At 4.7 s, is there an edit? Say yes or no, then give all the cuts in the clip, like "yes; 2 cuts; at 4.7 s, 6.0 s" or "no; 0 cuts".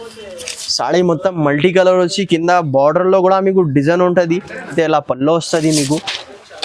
yes; 1 cut; at 4.7 s